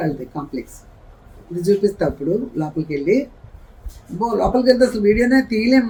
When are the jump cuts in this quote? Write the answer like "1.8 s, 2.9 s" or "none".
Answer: none